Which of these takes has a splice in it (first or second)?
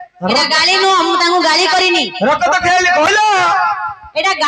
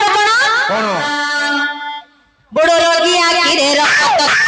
second